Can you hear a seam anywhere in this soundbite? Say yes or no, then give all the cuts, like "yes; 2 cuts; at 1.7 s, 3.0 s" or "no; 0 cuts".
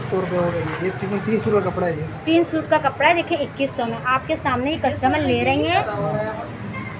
yes; 1 cut; at 5.9 s